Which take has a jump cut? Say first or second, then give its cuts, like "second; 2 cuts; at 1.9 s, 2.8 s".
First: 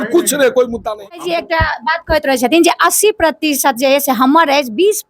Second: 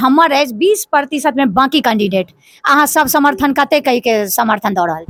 first; 1 cut; at 1.2 s